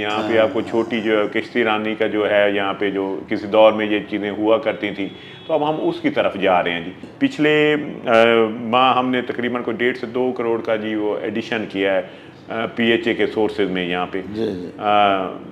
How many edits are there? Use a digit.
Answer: 1